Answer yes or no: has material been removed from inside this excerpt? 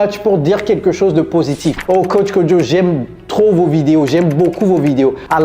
yes